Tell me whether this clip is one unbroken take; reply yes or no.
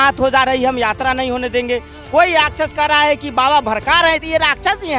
yes